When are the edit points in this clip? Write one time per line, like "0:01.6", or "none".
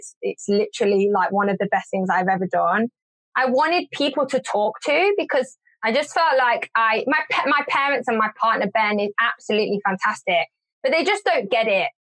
0:03.0
0:05.7